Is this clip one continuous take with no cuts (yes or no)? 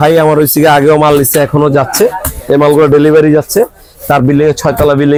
yes